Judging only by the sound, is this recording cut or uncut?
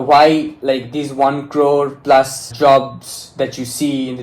cut